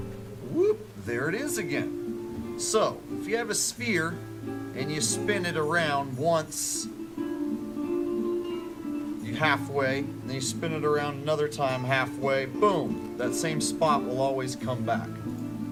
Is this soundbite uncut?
yes; 0 cuts

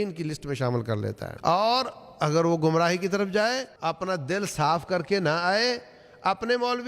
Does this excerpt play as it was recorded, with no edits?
no; 2 cuts; at 1.3 s, 3.7 s

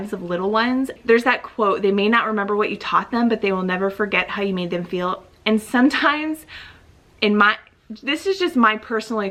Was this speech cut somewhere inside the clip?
no; 0 cuts

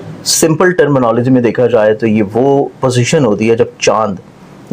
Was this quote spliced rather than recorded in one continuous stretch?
no; 0 cuts

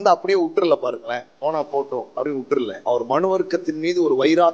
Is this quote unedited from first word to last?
no; 1 cut; at 2.8 s

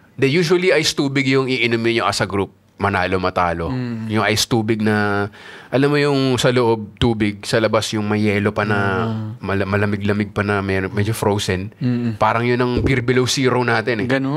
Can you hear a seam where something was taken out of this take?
no; 0 cuts

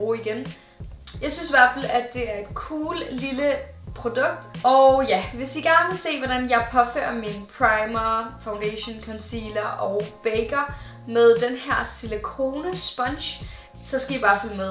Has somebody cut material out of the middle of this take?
yes; 1 cut; at 2.8 s

